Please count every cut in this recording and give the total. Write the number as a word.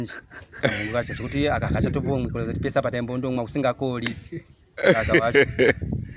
zero